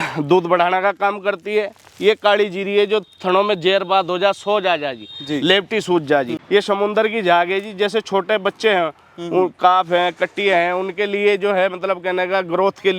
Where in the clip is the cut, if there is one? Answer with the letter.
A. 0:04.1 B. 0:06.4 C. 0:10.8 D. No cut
B